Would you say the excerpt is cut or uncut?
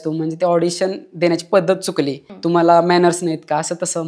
cut